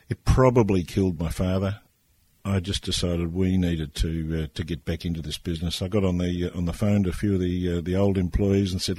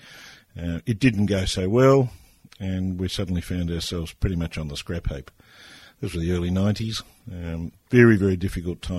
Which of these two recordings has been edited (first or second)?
first